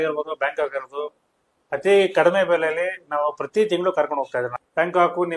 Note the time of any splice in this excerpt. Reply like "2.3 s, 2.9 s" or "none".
none